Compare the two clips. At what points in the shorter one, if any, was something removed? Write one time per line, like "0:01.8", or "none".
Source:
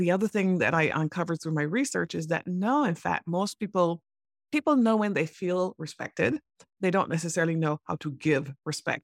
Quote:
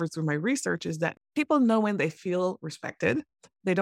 0:01.2